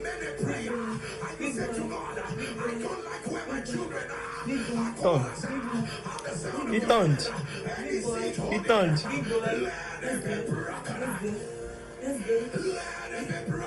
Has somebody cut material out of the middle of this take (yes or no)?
no